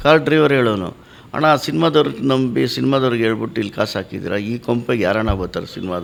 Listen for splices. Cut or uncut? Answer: uncut